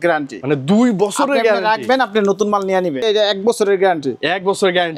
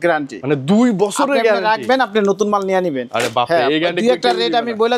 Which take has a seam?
first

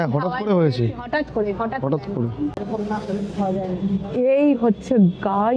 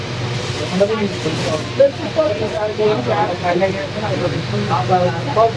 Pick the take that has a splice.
first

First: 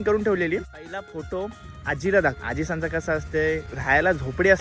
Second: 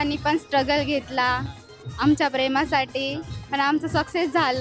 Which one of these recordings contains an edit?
first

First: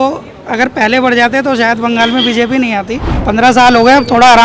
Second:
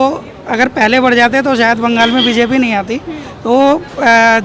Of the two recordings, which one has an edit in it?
first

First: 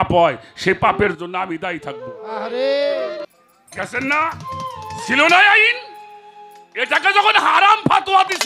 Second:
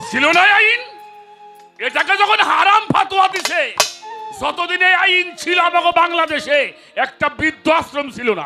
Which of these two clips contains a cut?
first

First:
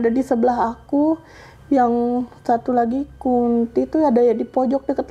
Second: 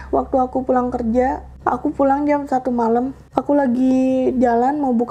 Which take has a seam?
second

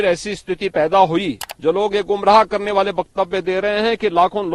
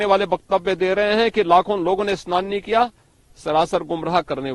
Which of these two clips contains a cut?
first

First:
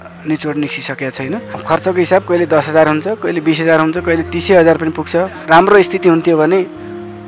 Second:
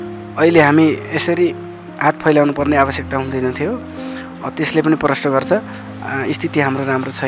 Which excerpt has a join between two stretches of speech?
first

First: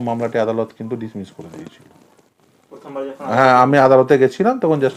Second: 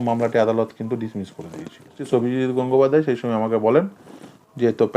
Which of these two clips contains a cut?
second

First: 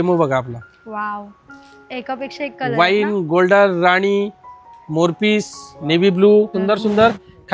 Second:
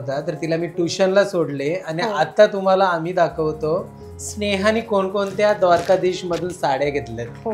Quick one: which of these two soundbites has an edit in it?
first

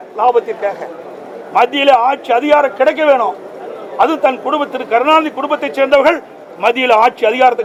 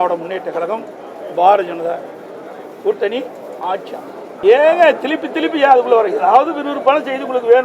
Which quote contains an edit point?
second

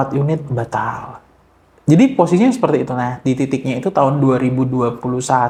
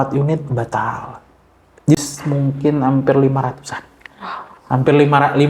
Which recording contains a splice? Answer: second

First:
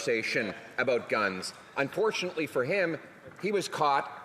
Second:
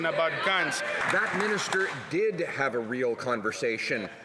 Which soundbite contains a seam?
second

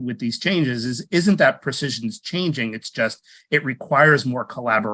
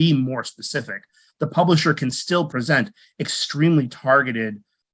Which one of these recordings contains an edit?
second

